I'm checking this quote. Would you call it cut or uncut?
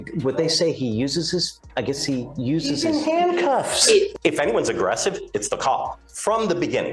cut